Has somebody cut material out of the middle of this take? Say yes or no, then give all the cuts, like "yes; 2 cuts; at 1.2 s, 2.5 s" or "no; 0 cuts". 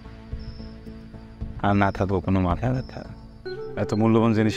yes; 1 cut; at 3.4 s